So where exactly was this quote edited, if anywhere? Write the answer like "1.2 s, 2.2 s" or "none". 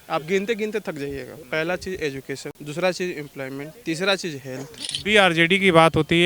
1.3 s, 2.6 s, 3.7 s, 4.9 s